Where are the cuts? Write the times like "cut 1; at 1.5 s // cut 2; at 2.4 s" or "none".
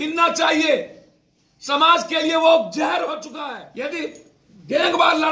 cut 1; at 3.3 s